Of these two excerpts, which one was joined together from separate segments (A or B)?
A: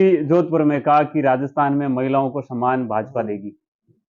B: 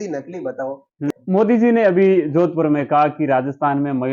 B